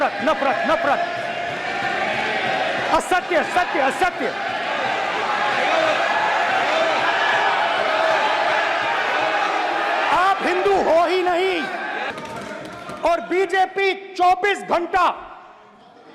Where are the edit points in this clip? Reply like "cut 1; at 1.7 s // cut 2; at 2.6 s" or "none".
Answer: cut 1; at 12.1 s